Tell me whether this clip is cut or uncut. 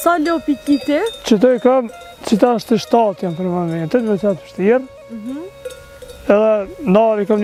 uncut